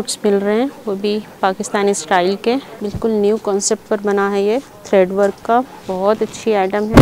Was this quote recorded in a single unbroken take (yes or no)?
no